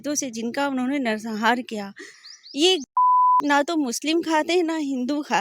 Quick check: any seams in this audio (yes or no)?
yes